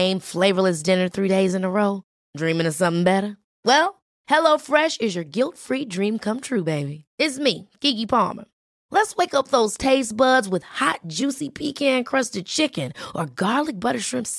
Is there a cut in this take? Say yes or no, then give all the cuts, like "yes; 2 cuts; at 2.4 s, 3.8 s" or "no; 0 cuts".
no; 0 cuts